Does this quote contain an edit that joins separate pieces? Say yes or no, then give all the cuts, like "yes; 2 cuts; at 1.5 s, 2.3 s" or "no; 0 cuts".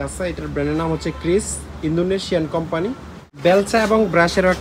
yes; 1 cut; at 3.4 s